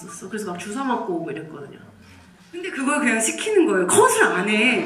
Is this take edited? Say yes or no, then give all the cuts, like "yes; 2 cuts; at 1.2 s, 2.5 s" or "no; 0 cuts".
no; 0 cuts